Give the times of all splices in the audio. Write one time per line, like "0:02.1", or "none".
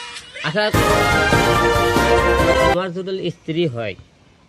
0:00.7
0:02.7